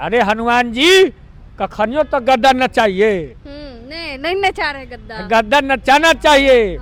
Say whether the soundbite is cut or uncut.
uncut